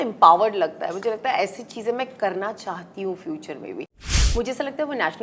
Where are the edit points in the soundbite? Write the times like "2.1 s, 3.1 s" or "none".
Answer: 4.0 s